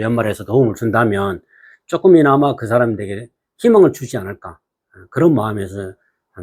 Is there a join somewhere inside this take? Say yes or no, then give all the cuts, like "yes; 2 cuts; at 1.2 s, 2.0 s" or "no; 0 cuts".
no; 0 cuts